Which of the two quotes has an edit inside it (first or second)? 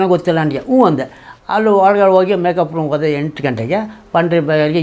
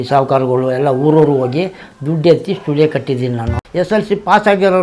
second